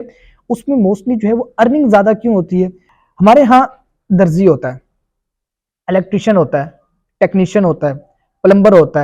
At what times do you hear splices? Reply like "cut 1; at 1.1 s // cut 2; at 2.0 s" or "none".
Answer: cut 1; at 2.8 s